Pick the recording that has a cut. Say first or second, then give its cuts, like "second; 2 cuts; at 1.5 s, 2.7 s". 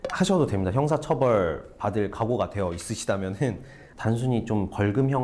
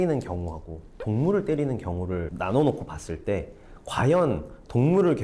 first; 1 cut; at 3.9 s